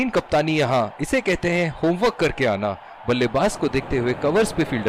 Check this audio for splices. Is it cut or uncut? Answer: uncut